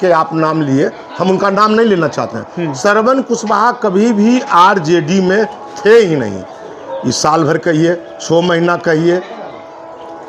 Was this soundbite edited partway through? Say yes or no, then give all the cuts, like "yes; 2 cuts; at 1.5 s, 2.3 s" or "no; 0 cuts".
no; 0 cuts